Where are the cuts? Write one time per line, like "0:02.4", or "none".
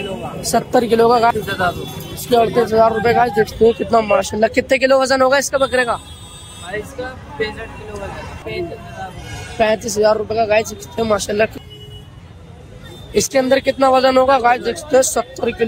0:01.3
0:03.5
0:08.4
0:11.6